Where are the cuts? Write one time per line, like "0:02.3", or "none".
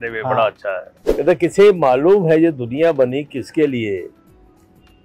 0:01.0